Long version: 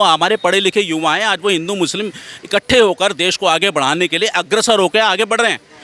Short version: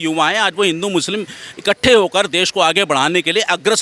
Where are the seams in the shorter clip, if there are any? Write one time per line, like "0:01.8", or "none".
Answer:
none